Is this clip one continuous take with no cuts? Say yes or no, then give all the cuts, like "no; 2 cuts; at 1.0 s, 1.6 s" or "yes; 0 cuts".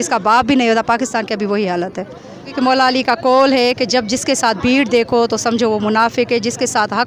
no; 1 cut; at 2.5 s